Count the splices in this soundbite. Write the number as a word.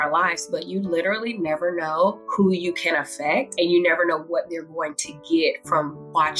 two